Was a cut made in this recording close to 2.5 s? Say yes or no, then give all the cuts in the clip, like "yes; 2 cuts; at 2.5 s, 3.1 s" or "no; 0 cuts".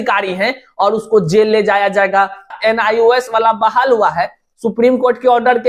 yes; 1 cut; at 2.5 s